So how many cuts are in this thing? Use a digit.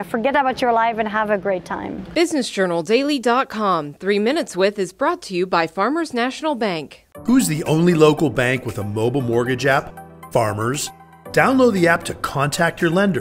1